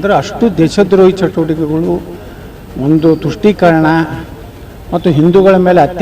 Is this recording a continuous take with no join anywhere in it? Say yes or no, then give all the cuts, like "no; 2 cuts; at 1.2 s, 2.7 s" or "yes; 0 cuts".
yes; 0 cuts